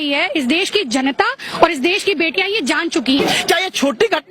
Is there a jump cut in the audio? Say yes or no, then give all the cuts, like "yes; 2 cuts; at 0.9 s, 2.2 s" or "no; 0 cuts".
yes; 1 cut; at 3.2 s